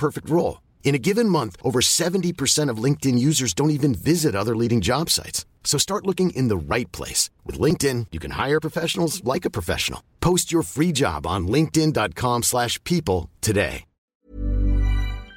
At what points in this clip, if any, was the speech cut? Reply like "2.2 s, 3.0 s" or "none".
14.0 s